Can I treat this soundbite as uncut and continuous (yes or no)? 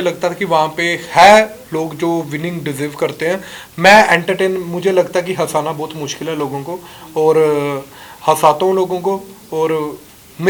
yes